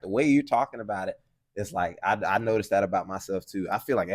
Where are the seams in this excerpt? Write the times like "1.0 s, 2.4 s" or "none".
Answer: none